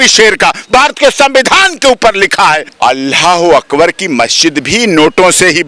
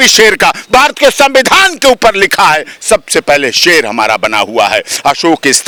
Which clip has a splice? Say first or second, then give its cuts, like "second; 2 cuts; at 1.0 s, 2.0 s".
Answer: first; 1 cut; at 2.7 s